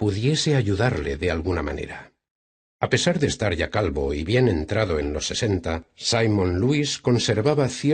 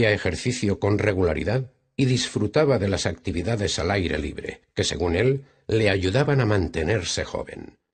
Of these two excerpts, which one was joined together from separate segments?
first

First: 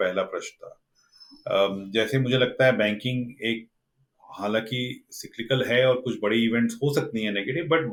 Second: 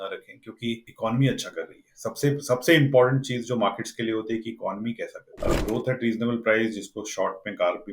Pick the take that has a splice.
second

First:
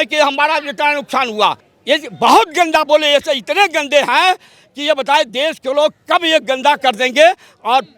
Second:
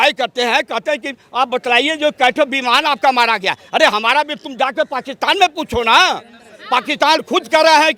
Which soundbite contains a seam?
first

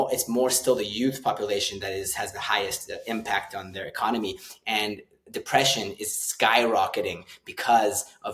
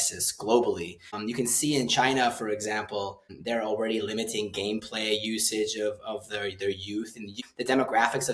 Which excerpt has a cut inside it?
second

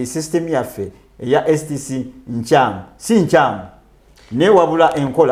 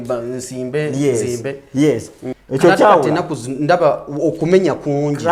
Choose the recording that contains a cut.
second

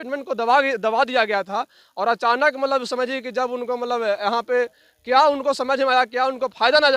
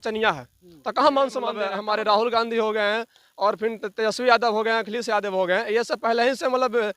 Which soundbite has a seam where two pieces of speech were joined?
second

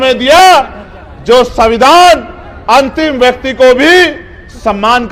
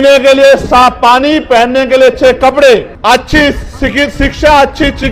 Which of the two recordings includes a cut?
second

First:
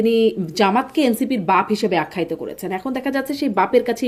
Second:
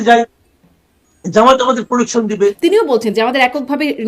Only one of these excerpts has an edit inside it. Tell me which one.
second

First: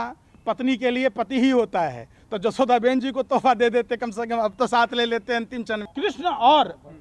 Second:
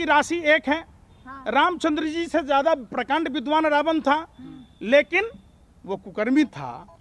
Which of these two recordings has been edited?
first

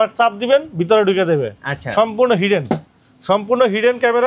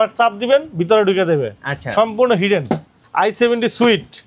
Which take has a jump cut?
second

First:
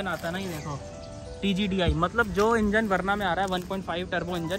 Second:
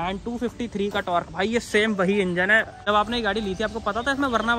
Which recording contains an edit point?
second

